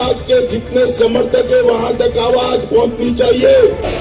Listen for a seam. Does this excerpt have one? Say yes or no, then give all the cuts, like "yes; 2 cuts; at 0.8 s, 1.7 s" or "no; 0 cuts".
no; 0 cuts